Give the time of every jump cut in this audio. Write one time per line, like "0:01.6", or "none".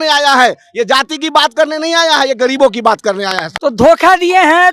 0:03.4